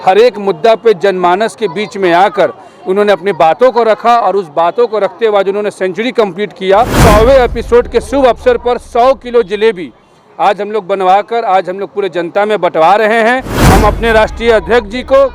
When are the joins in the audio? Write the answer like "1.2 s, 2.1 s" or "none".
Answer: 6.9 s, 13.5 s